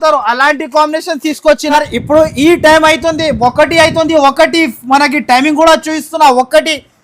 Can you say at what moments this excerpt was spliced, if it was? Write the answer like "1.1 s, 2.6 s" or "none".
1.7 s